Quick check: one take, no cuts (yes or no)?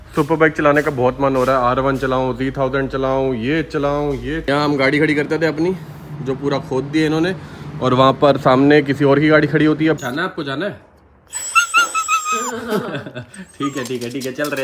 no